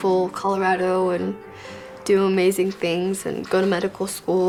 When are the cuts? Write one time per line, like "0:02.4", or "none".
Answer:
none